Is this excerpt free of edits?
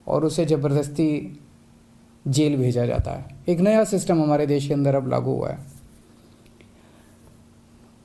no; 1 cut; at 7.2 s

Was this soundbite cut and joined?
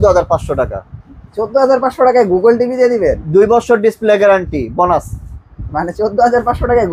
no; 0 cuts

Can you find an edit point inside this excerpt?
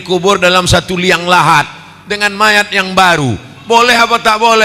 no; 0 cuts

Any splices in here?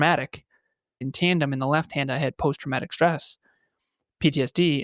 yes; 1 cut; at 1.1 s

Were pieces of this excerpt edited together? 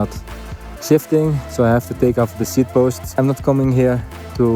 yes; 1 cut; at 3.2 s

